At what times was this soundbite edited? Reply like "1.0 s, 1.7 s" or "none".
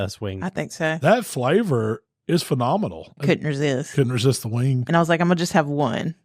1.0 s, 3.1 s